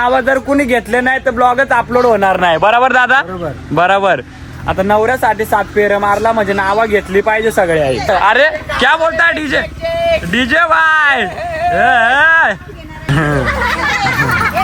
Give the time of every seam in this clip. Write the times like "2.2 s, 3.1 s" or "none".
none